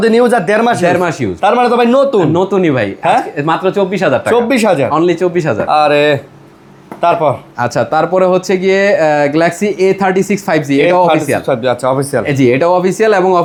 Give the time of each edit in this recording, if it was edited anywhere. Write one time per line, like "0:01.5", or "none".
none